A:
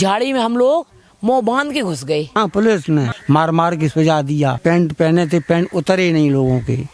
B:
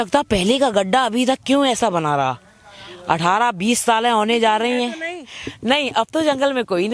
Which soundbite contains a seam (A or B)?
A